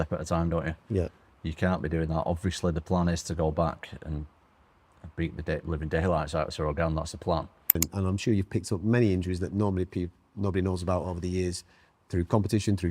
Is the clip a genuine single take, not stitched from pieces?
no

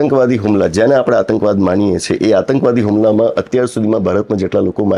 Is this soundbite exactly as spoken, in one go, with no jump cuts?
yes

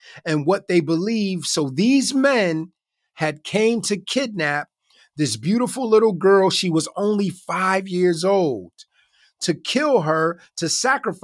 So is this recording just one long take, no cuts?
yes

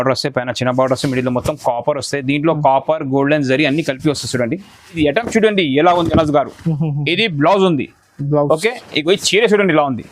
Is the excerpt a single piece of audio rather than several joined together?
no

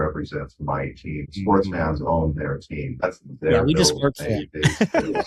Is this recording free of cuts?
no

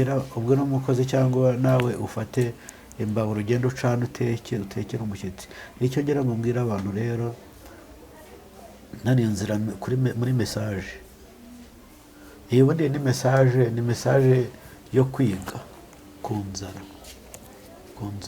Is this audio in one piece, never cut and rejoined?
yes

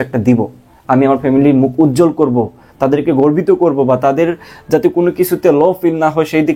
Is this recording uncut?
yes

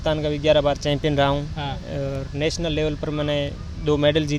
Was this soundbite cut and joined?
no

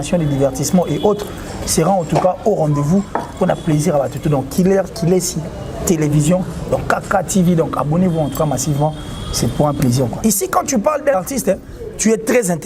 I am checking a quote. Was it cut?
yes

